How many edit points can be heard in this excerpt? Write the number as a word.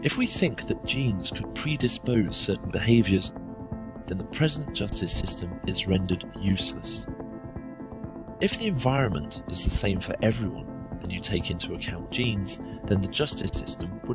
one